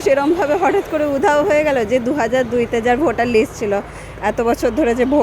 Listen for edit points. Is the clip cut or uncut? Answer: uncut